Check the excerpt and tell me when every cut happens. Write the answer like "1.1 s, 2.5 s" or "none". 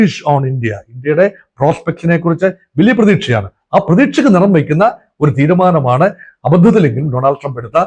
none

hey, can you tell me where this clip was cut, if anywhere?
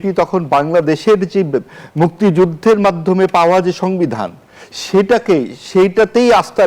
none

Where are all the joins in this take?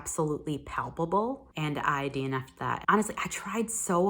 1.5 s, 2.8 s

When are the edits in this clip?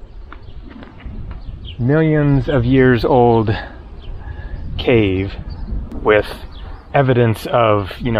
5.8 s

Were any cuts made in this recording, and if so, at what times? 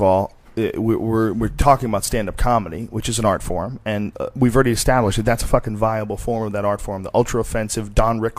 6.8 s

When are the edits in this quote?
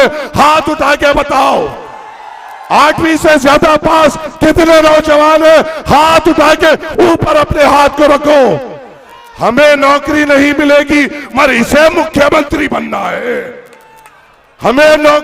none

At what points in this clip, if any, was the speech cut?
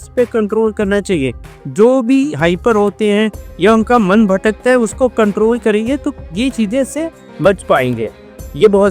none

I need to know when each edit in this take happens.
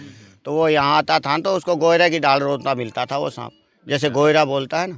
none

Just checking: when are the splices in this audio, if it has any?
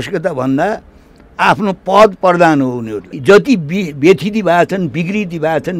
3.1 s

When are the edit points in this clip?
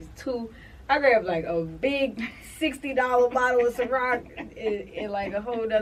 none

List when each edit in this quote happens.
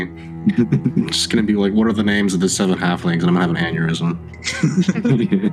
none

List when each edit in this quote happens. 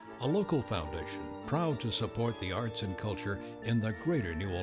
none

